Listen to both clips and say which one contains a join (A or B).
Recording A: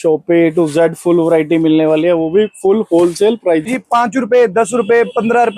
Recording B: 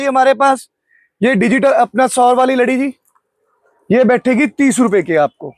A